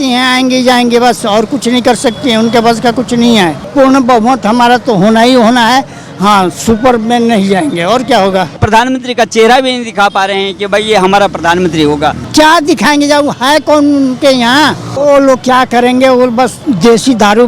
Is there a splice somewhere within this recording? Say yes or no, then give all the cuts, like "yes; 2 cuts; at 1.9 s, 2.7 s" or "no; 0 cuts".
yes; 5 cuts; at 3.6 s, 8.6 s, 12.3 s, 14.9 s, 16.6 s